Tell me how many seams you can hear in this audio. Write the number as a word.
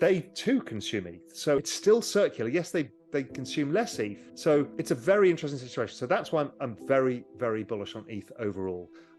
two